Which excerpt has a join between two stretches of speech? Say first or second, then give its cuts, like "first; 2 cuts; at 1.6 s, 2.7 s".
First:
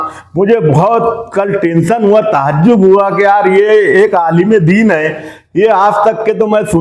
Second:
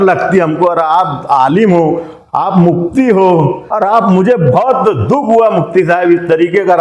second; 1 cut; at 3.6 s